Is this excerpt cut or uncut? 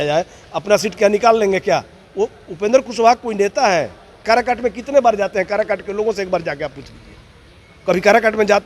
cut